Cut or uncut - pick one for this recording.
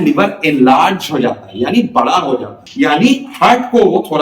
cut